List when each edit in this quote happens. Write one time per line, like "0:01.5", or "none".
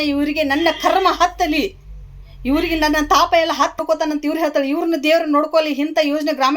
0:03.8